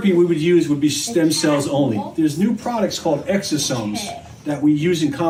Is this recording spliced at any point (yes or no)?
no